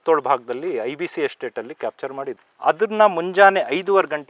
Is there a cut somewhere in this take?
no; 0 cuts

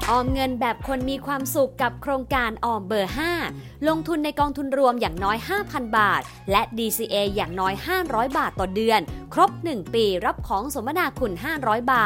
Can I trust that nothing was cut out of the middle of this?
yes; 0 cuts

